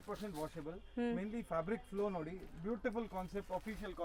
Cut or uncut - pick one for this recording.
uncut